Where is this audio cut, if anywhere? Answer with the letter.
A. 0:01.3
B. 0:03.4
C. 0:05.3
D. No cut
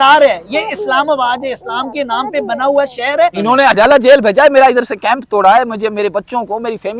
B